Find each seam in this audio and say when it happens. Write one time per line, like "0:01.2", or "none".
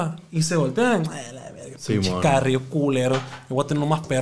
none